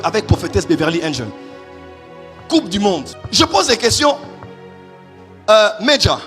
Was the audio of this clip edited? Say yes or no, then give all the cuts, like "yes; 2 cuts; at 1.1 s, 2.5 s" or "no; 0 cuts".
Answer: yes; 1 cut; at 3.2 s